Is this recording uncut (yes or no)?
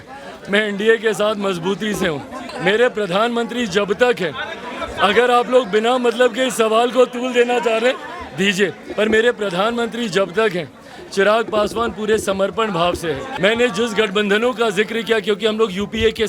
no